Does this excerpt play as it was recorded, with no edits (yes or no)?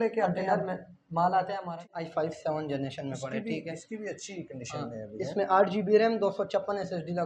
no